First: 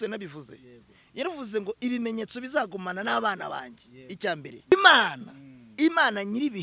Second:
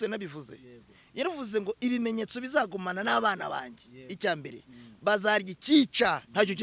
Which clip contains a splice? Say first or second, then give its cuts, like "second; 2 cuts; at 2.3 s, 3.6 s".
first; 1 cut; at 4.7 s